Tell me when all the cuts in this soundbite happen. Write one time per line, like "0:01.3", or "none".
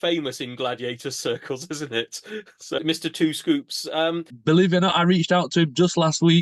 0:02.7
0:04.3